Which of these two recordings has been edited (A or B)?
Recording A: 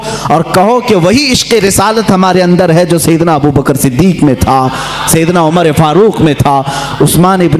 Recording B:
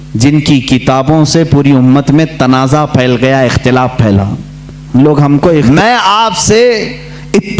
B